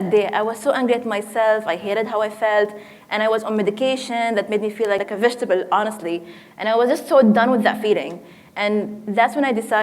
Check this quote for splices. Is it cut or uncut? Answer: cut